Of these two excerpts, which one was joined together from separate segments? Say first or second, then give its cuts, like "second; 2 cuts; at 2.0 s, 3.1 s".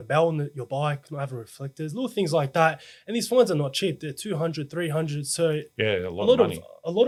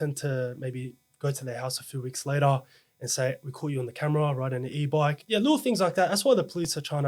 second; 1 cut; at 5.2 s